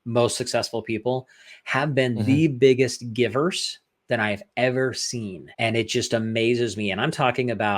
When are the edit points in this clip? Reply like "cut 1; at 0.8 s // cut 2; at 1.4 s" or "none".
cut 1; at 5.4 s

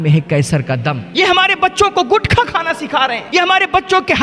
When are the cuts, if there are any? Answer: cut 1; at 1.0 s // cut 2; at 3.2 s

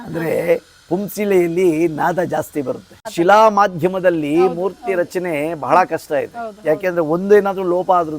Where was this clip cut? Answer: cut 1; at 3.1 s

